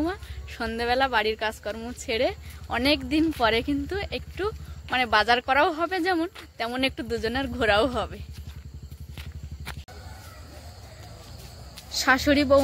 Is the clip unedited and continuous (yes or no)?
yes